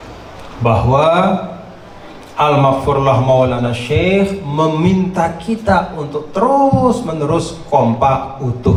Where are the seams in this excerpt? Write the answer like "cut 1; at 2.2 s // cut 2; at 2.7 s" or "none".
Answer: none